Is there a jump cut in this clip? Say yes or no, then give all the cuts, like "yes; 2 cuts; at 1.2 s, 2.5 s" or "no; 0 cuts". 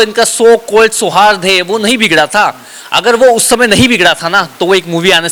no; 0 cuts